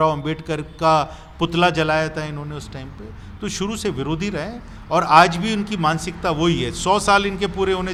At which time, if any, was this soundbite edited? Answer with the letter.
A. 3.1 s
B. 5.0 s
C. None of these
C